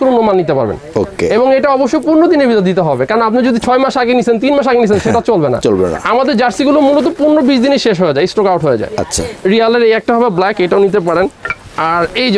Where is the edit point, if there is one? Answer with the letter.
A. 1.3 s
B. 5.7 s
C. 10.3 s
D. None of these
D